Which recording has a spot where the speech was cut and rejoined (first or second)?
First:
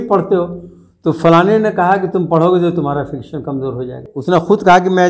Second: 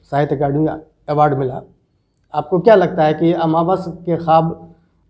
first